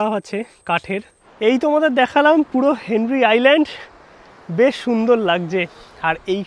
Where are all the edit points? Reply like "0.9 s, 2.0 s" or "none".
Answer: 1.2 s